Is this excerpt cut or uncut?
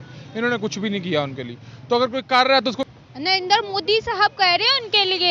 cut